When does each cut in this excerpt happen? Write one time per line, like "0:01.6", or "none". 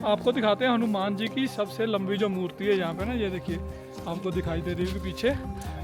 none